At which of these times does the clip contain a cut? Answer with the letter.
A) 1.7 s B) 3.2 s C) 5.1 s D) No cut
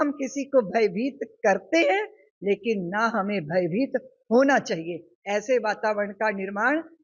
D